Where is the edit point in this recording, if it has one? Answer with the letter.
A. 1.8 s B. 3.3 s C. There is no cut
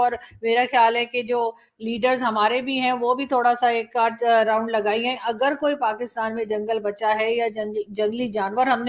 C